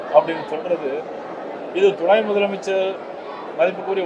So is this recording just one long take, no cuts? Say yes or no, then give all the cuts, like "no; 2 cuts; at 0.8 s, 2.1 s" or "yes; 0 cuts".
yes; 0 cuts